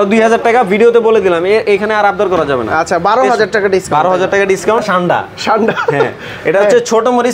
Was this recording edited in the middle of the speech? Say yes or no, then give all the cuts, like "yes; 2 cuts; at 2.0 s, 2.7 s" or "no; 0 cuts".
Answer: yes; 1 cut; at 4.8 s